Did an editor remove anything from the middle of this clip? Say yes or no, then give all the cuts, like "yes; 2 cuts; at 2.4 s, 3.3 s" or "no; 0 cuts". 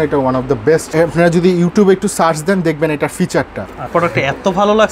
yes; 2 cuts; at 0.9 s, 3.9 s